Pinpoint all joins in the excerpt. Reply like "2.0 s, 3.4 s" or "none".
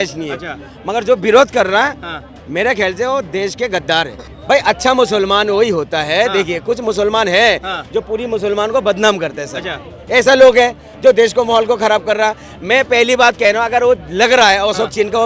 4.3 s